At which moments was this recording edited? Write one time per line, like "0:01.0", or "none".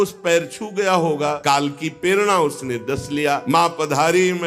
0:01.4
0:03.4